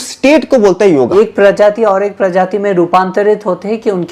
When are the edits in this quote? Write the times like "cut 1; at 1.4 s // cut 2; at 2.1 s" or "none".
cut 1; at 1.1 s